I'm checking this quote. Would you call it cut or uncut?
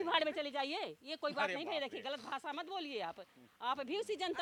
uncut